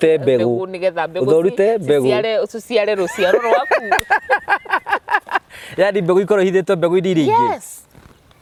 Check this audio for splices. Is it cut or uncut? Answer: uncut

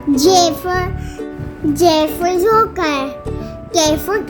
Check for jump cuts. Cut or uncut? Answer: uncut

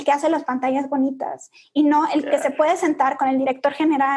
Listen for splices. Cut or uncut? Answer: uncut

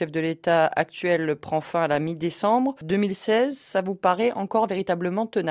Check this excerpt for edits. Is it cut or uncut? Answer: cut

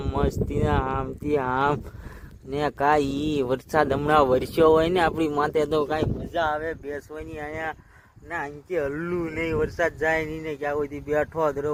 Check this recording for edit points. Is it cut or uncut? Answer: uncut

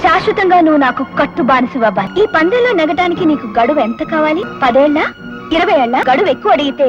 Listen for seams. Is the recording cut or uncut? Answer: cut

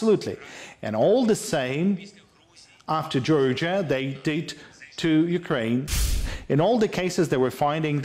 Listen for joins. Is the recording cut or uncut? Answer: cut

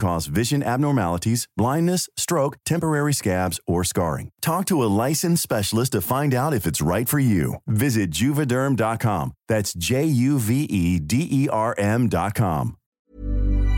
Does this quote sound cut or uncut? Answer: cut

